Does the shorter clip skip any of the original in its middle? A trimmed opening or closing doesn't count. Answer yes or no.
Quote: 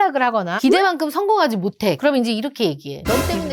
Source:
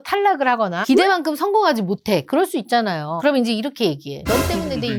yes